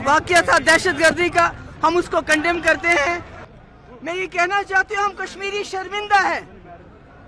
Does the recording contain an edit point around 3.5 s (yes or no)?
yes